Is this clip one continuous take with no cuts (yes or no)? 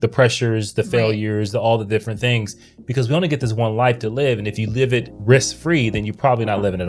yes